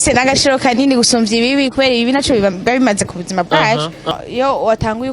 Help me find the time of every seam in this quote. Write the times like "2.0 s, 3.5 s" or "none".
4.2 s